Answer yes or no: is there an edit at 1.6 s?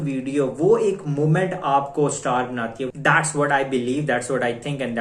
no